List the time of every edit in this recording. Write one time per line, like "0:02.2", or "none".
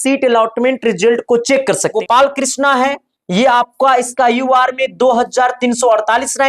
0:01.9